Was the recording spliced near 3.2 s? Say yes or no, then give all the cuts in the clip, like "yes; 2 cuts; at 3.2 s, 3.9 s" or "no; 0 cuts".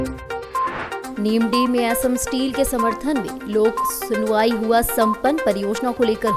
no; 1 cut; at 1.0 s